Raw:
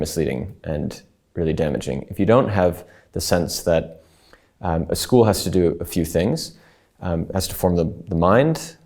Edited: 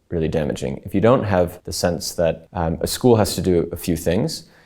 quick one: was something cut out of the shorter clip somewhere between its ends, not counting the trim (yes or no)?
yes